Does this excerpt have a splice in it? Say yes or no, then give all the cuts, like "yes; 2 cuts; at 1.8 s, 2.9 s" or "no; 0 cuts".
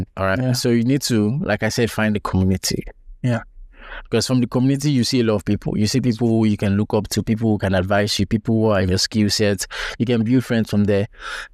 no; 0 cuts